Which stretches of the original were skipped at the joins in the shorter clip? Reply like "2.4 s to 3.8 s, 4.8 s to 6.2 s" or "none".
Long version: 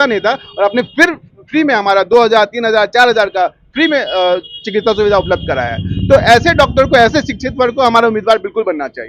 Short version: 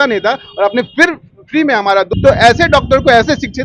2.1 s to 5.9 s

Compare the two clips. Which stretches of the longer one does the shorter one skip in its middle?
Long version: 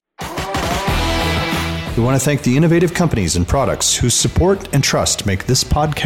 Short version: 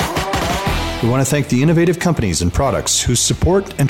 1.1 s to 1.9 s

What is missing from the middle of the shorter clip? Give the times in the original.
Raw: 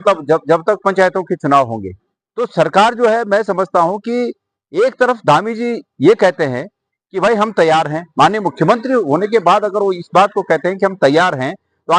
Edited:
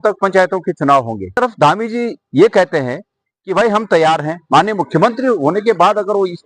2.0 s to 5.1 s

